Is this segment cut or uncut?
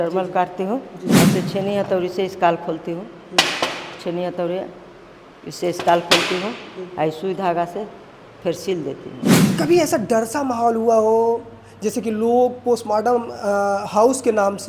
cut